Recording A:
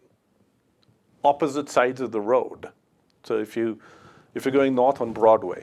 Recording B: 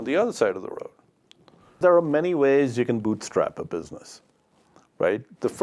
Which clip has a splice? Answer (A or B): B